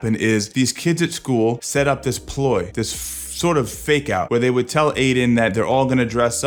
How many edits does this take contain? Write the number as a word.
zero